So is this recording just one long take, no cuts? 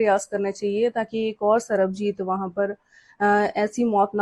yes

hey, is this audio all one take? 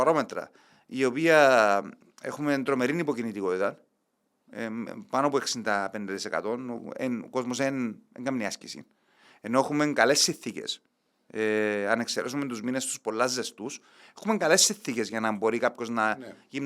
yes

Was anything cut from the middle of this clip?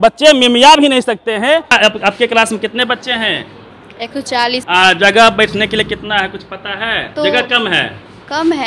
yes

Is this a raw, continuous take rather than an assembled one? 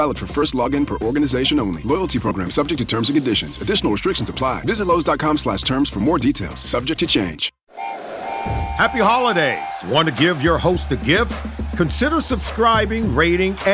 no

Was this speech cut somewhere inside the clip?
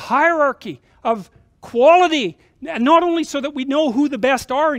no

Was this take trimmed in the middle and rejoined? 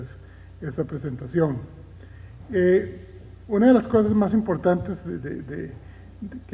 yes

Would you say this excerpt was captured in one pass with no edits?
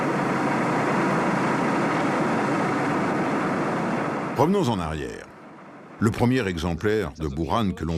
yes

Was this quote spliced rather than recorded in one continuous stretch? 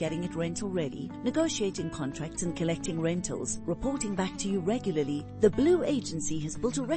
no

